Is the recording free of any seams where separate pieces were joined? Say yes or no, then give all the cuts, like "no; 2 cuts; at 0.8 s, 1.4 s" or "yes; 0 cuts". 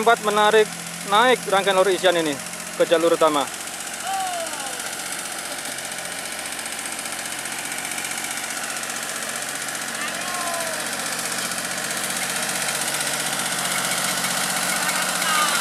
yes; 0 cuts